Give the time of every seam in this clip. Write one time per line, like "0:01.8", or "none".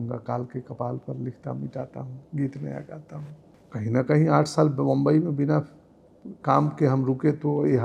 none